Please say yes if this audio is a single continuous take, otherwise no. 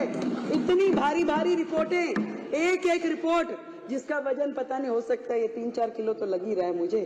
yes